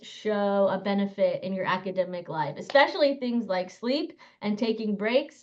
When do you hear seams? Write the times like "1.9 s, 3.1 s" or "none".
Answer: none